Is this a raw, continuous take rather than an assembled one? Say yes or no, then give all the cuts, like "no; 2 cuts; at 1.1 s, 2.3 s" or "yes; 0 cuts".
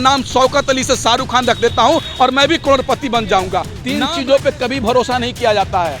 no; 1 cut; at 3.8 s